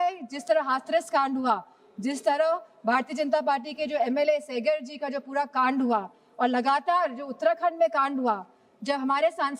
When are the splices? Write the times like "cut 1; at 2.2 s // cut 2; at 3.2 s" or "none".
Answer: none